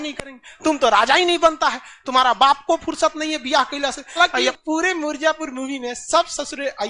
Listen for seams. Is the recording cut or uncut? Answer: cut